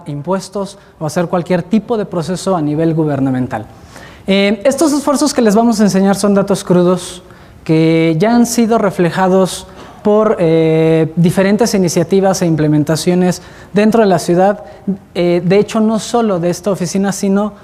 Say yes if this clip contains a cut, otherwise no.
no